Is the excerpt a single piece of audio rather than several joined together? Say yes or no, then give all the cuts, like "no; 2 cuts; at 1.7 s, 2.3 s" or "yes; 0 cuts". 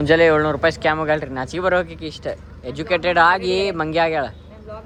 yes; 0 cuts